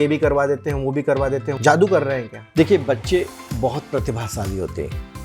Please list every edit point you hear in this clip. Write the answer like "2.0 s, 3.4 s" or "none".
1.5 s, 2.4 s